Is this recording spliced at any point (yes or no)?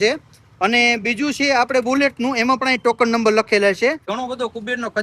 yes